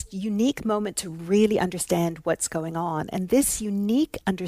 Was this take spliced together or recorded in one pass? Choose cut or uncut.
uncut